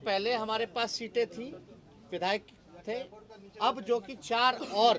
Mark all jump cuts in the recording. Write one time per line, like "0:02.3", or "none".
none

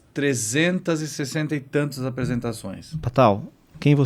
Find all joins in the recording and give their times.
none

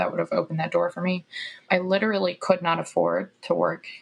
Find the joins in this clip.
0:01.7

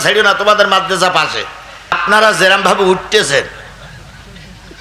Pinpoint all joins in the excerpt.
0:02.0

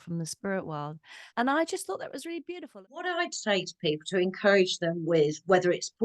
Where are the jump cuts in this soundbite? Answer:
0:01.3
0:02.7

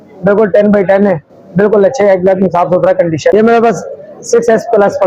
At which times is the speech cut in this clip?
0:03.3

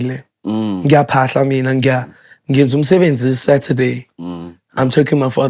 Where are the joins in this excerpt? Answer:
none

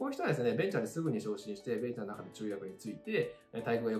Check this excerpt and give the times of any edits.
none

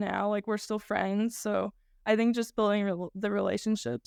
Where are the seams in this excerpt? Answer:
none

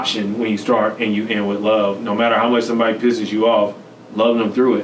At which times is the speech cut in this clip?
none

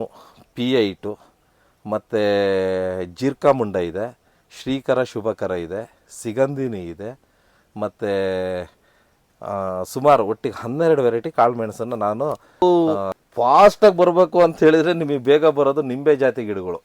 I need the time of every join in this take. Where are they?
0:12.6

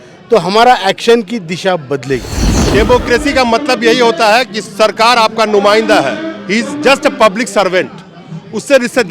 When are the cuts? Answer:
0:02.7

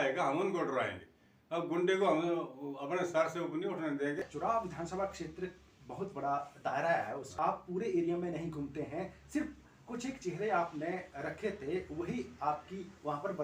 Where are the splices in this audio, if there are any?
0:04.2
0:07.3

